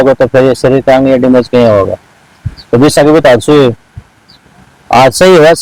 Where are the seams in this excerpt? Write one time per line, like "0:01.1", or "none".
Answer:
none